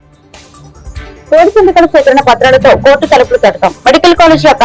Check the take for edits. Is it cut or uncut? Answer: cut